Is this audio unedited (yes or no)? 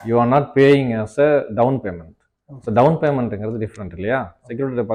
yes